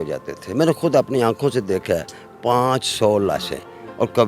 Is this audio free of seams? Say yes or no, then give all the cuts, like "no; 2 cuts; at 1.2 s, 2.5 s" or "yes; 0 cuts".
yes; 0 cuts